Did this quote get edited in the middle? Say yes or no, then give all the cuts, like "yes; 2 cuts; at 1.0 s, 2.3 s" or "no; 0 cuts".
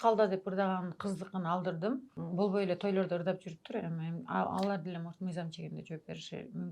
yes; 1 cut; at 2.2 s